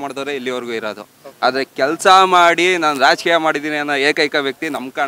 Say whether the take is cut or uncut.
uncut